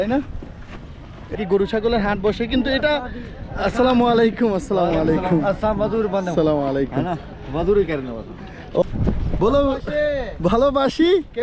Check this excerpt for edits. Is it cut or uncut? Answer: cut